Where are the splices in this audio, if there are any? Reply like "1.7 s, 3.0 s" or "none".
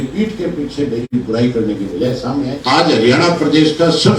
2.6 s